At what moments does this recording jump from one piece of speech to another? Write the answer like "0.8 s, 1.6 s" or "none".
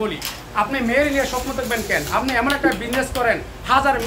none